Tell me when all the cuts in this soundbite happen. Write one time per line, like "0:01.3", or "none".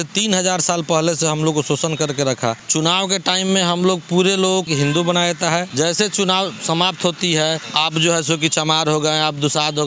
0:02.6
0:04.7
0:05.7
0:07.7